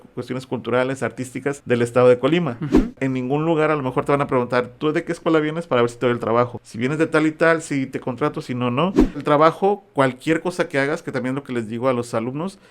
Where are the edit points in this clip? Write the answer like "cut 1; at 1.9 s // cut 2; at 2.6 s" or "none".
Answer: cut 1; at 1.6 s // cut 2; at 2.9 s // cut 3; at 6.6 s // cut 4; at 9.2 s